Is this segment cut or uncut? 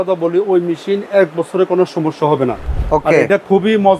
cut